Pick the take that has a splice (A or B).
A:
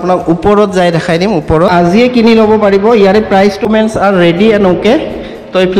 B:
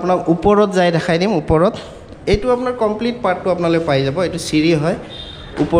A